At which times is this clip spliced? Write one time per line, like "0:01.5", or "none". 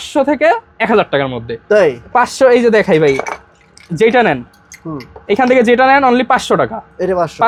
none